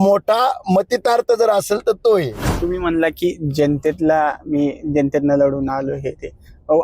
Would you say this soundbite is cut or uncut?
cut